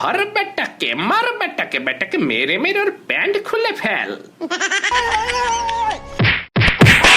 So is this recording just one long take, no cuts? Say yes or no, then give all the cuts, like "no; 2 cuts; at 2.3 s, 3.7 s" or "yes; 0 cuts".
yes; 0 cuts